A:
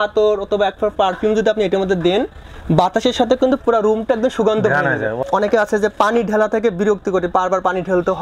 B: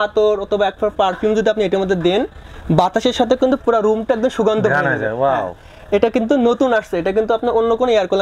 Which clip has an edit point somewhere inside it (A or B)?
A